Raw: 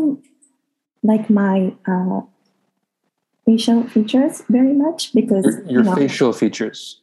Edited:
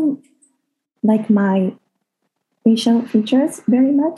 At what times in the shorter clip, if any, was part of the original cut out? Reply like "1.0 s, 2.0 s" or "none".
1.8 s